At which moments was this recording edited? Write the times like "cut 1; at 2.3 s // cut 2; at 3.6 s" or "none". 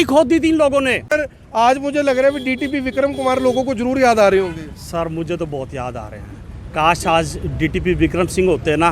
cut 1; at 1.1 s